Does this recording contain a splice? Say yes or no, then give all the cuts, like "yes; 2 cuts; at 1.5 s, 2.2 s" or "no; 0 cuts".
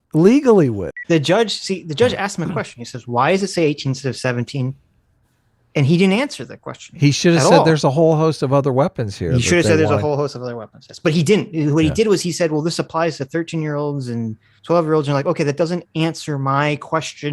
yes; 1 cut; at 0.9 s